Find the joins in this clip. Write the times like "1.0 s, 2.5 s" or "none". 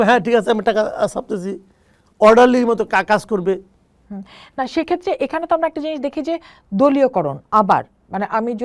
none